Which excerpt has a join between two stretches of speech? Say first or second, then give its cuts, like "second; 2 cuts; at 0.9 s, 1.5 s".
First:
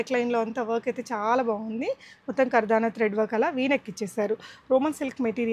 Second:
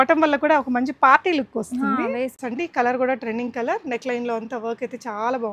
second; 1 cut; at 2.4 s